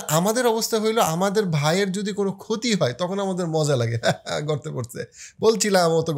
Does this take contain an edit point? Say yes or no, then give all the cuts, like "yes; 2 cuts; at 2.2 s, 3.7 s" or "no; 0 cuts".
no; 0 cuts